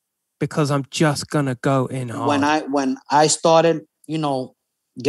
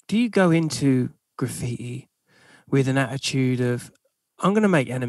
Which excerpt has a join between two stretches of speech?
first; 1 cut; at 2.1 s

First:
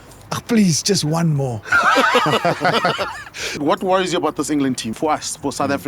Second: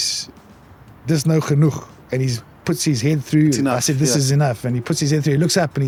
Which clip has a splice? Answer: first; 2 cuts; at 3.6 s, 4.9 s

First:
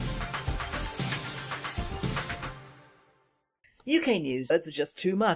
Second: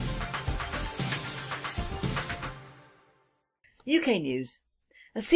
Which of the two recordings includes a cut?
second; 1 cut; at 4.4 s

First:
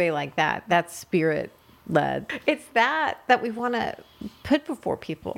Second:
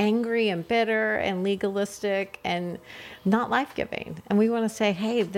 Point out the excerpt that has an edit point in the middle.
first; 1 cut; at 2.3 s

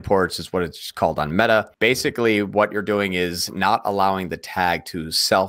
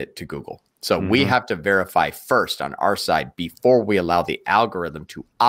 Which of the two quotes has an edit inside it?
first; 1 cut; at 1.7 s

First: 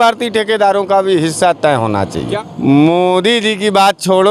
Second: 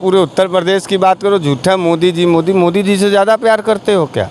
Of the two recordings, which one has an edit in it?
first; 1 cut; at 2.3 s

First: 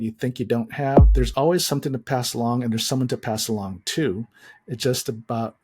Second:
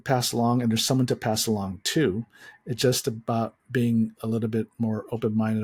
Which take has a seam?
first; 1 cut; at 1.1 s

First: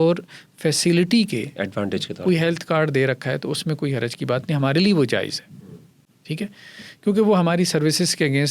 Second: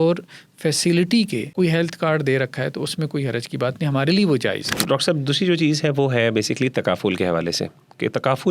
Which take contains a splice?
second; 2 cuts; at 1.5 s, 4.7 s

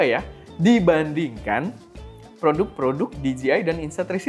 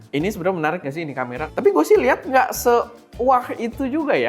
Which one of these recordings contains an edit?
second; 1 cut; at 1.4 s

